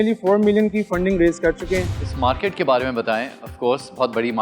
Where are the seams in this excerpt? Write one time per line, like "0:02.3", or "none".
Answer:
0:02.0

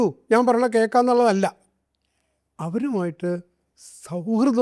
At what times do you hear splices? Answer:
none

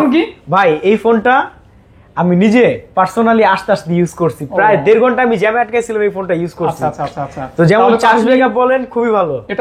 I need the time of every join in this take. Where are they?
none

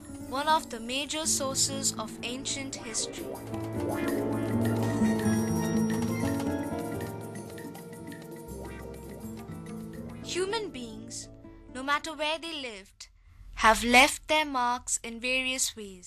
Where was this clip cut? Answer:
none

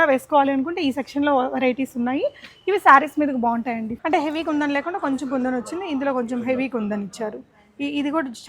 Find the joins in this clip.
0:03.9

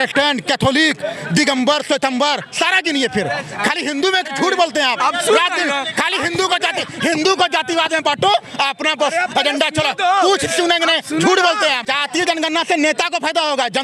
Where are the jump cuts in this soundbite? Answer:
0:04.3
0:11.9

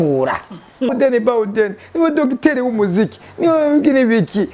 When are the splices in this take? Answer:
0:00.9

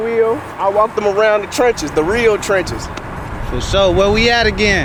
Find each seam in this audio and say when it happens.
none

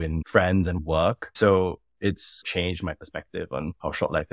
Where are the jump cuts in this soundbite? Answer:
0:00.8
0:02.4

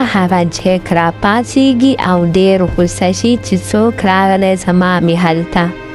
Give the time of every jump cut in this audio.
0:01.3

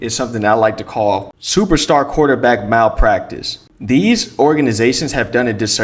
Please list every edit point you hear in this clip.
none

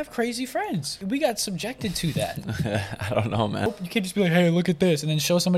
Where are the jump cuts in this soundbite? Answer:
0:00.9
0:03.7

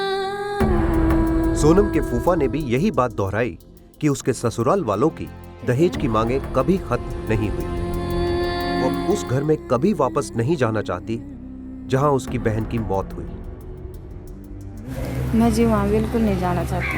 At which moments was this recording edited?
0:09.0

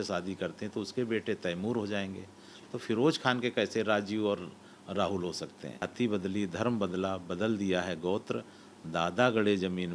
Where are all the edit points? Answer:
0:05.8

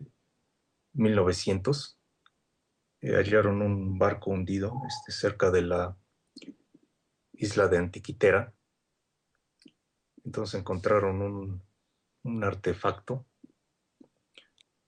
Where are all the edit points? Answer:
none

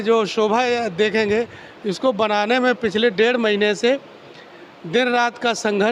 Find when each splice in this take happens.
none

